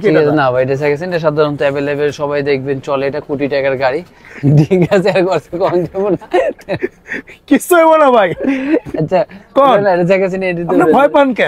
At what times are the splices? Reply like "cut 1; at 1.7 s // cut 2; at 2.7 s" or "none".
none